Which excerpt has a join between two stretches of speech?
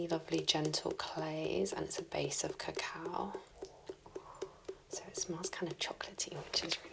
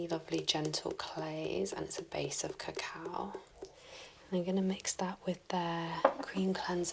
second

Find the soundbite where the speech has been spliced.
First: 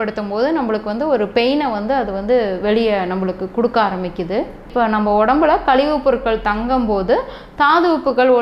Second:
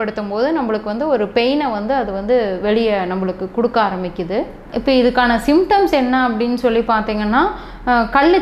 first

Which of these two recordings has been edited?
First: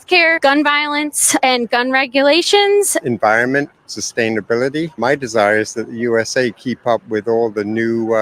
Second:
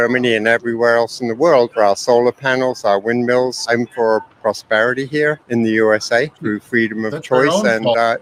first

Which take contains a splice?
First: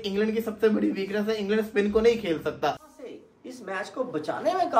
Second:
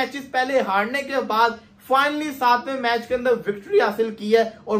first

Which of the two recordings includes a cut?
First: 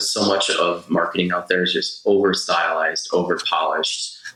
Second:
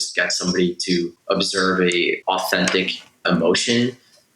second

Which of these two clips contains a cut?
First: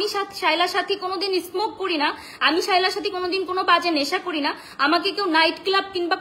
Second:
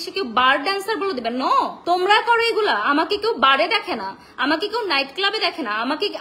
second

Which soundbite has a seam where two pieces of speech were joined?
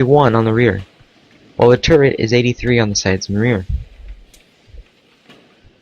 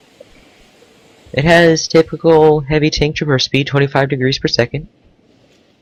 first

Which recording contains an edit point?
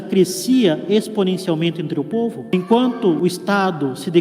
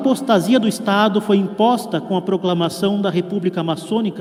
first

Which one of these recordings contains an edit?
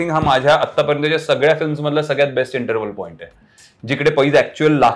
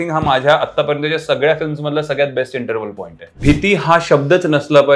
second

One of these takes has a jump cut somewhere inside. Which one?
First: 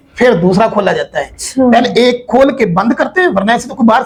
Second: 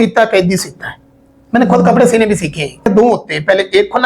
second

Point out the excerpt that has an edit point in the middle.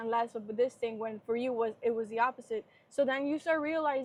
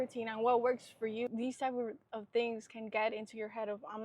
second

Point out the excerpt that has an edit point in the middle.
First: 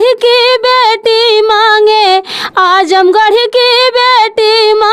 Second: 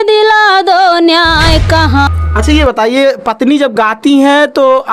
second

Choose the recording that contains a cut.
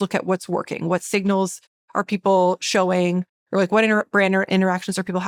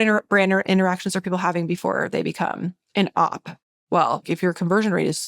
second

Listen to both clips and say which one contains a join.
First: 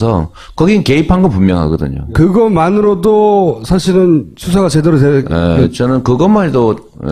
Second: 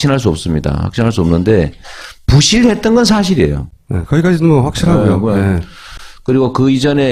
first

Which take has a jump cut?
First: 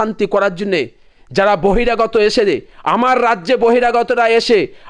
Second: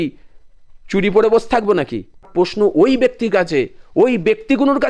second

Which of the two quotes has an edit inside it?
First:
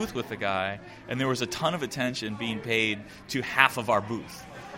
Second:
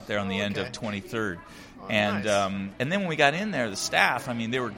second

